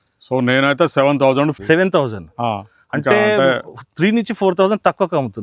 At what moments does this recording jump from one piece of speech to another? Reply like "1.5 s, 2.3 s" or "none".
1.6 s